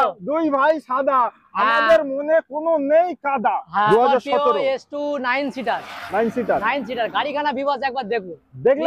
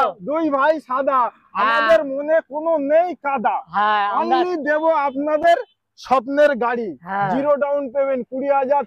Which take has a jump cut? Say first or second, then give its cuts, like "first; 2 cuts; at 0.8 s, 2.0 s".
first; 1 cut; at 3.9 s